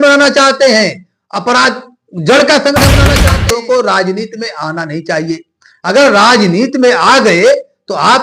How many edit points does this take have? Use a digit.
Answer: 1